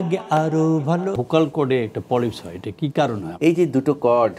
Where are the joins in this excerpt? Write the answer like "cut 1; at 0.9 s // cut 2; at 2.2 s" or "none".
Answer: cut 1; at 1.2 s // cut 2; at 3.3 s

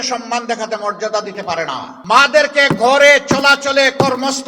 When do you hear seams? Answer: cut 1; at 1.9 s

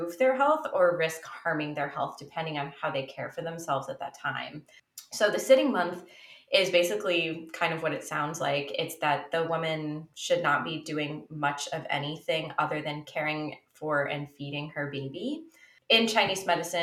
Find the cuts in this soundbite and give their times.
cut 1; at 5.1 s // cut 2; at 15.7 s

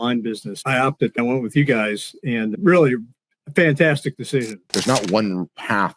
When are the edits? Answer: cut 1; at 4.6 s

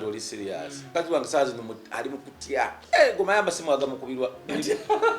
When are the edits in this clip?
cut 1; at 0.9 s // cut 2; at 2.8 s

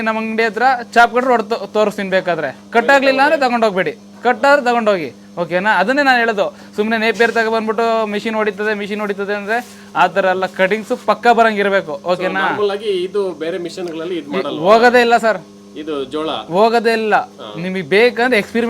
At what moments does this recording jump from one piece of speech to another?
none

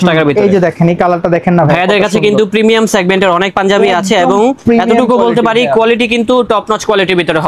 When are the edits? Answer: none

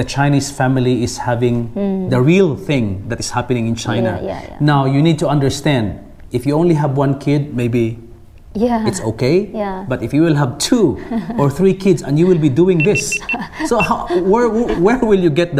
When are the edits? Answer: none

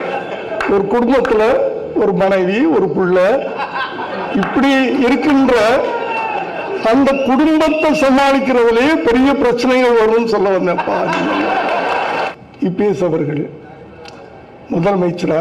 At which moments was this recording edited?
cut 1; at 12.3 s

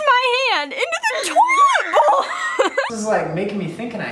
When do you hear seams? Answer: cut 1; at 2.9 s

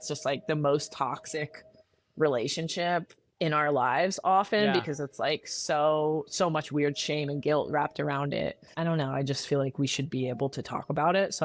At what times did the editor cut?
cut 1; at 8.7 s

